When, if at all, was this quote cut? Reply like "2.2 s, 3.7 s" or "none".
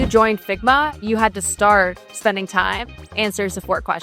2.1 s